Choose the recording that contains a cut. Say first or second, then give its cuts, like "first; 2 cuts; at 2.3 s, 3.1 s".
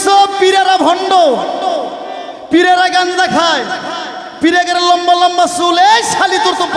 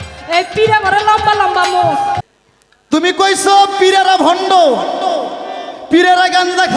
second; 1 cut; at 2.2 s